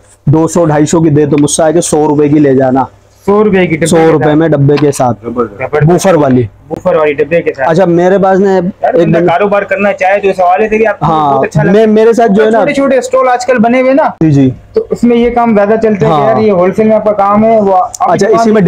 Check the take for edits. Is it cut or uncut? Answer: uncut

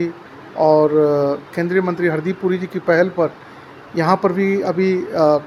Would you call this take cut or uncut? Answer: uncut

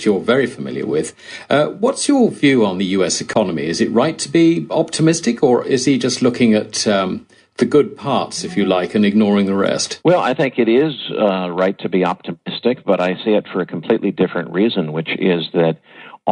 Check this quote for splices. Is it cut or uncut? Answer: uncut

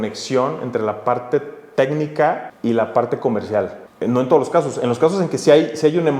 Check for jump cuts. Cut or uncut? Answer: cut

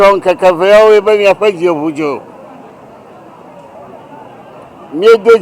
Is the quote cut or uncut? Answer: uncut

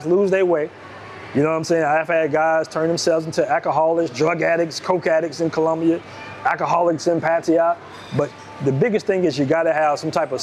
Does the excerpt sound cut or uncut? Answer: uncut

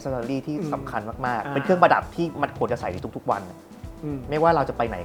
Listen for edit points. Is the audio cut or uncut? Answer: uncut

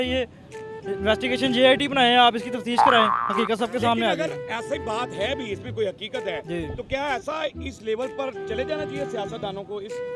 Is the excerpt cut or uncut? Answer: uncut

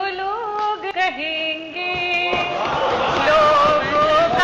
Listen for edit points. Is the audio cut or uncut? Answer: cut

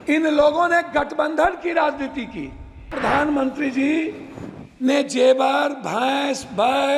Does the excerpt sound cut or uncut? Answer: cut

